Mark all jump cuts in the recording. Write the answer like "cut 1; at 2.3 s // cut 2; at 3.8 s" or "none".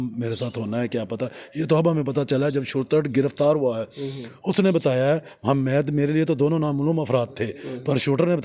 none